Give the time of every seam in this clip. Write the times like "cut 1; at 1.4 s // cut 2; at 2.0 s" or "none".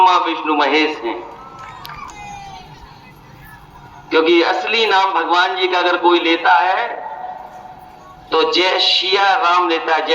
cut 1; at 2.1 s